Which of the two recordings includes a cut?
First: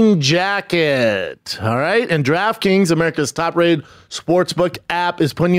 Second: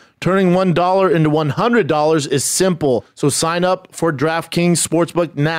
second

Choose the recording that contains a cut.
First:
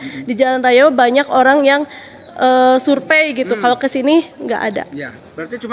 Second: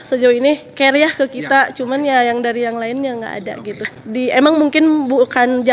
second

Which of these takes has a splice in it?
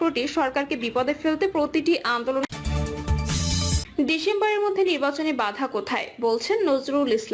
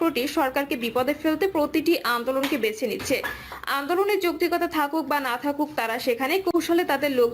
first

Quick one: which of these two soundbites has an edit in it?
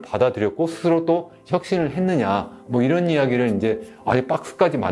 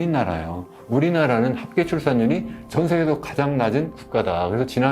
second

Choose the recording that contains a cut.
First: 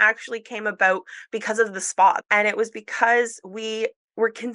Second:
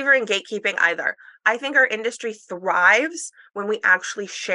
first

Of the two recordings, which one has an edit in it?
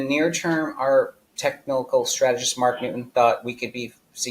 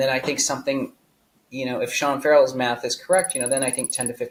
first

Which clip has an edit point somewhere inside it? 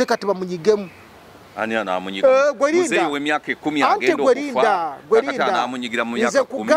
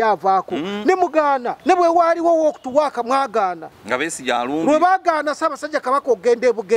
second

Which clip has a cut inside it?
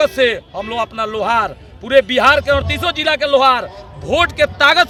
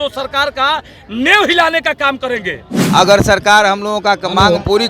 second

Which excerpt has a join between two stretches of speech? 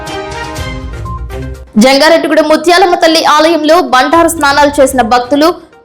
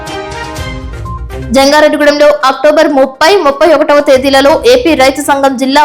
first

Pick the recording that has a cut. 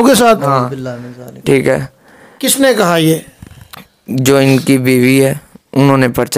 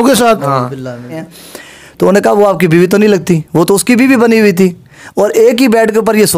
second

